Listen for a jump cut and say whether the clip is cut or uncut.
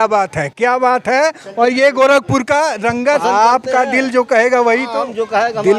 cut